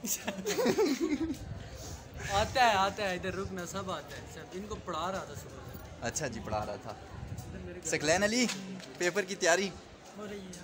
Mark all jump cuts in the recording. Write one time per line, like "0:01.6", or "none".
none